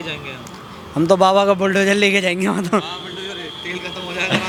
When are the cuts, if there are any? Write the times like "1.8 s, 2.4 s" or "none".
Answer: none